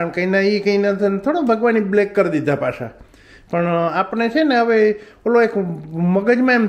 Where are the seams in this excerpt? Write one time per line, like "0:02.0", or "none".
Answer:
none